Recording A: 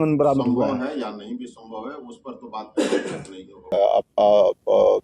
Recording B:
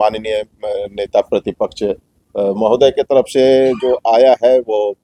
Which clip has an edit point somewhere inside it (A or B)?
A